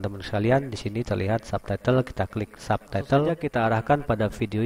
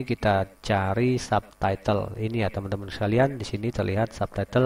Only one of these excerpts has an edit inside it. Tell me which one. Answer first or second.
first